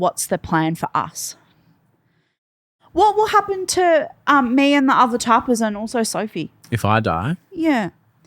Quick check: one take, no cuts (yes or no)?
no